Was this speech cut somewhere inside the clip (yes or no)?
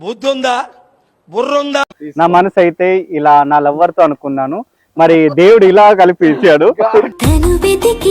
yes